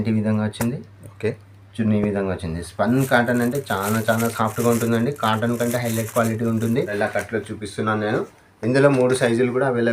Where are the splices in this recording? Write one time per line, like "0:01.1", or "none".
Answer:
0:06.9